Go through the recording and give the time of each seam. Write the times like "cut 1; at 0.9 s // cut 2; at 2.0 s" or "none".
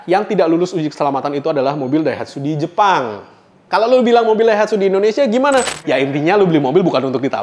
cut 1; at 5.8 s